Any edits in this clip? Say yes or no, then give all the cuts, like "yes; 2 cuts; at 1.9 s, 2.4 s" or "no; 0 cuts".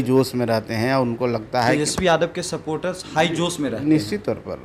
no; 0 cuts